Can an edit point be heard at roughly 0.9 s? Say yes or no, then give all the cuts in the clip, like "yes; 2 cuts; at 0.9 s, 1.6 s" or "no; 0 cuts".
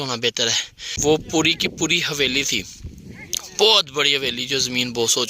yes; 1 cut; at 0.9 s